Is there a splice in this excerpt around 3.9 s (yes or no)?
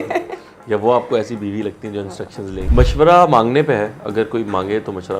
no